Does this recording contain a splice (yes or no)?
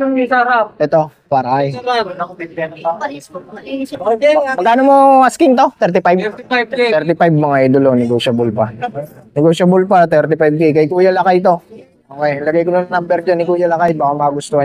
no